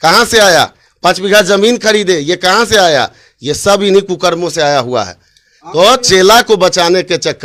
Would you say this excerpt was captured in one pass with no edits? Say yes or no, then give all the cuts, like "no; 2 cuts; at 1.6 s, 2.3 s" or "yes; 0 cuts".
yes; 0 cuts